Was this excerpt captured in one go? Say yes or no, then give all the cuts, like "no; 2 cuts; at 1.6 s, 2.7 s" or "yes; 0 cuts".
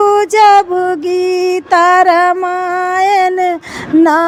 yes; 0 cuts